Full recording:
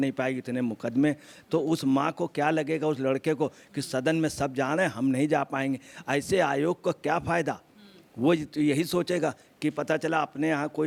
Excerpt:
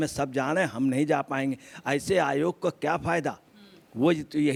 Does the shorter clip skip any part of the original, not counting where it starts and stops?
no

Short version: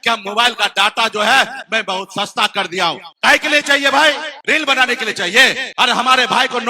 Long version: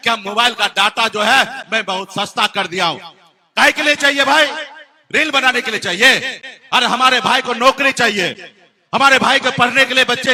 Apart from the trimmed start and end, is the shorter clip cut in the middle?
yes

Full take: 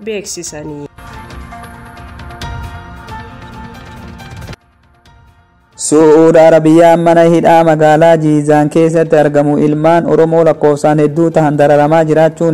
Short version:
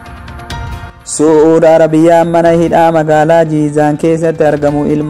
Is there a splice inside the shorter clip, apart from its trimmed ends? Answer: yes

